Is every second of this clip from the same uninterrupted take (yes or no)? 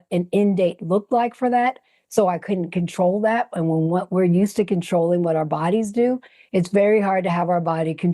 yes